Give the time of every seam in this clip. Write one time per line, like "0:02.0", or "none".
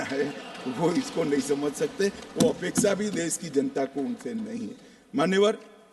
none